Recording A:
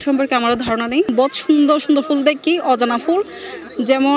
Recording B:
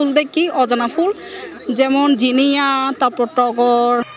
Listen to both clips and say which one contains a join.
A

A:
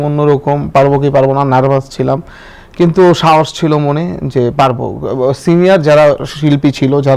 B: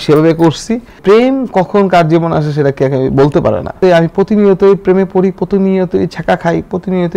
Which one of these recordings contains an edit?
B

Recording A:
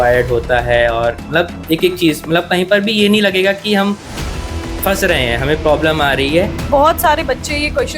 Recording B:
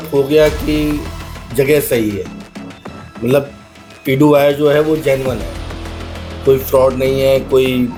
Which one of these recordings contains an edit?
A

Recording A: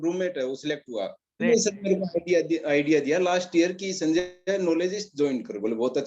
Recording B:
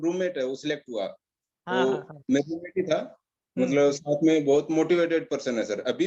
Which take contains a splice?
A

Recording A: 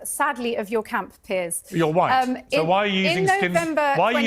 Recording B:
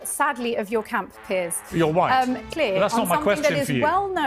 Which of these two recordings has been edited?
B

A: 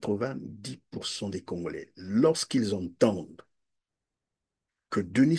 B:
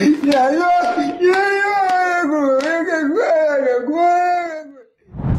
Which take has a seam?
B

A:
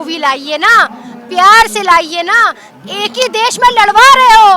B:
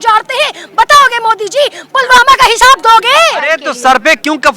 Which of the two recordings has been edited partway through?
B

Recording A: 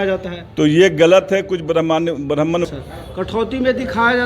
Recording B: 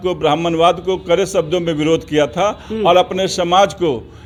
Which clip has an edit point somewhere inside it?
A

